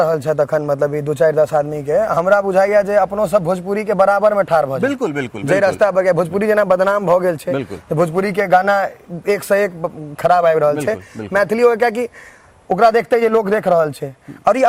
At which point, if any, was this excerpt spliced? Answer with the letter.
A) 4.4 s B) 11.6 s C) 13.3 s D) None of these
D